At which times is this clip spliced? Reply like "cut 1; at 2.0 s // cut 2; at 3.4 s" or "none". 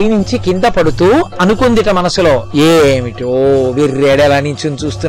none